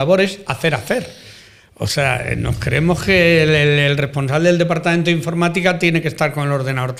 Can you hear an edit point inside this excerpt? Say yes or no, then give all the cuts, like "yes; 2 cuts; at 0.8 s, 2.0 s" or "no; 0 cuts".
no; 0 cuts